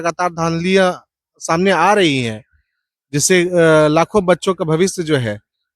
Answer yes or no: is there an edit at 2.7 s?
no